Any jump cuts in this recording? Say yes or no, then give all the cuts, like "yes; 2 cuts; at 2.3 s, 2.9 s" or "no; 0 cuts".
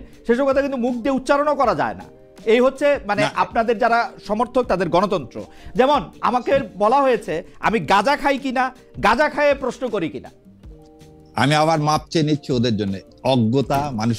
no; 0 cuts